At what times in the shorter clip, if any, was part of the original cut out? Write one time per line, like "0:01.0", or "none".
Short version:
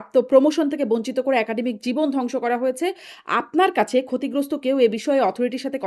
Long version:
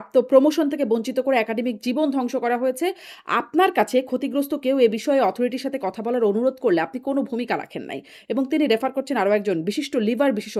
none